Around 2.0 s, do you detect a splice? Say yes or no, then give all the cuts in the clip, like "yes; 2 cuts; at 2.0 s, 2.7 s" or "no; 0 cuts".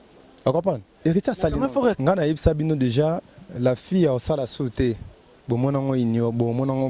yes; 1 cut; at 2.0 s